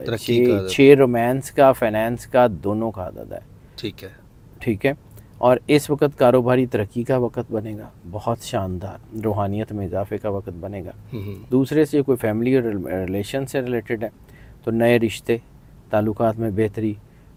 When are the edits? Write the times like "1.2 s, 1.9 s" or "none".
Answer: none